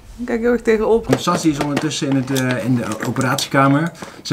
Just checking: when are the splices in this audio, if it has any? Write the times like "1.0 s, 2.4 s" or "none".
1.0 s